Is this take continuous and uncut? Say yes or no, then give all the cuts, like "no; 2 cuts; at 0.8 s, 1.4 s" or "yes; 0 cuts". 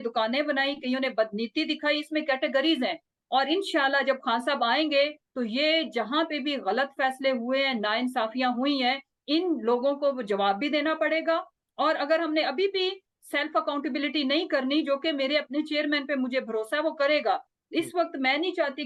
yes; 0 cuts